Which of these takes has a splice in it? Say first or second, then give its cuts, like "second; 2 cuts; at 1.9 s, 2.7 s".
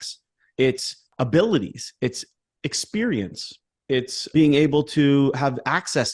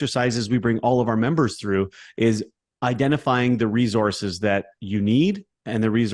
first; 1 cut; at 1.1 s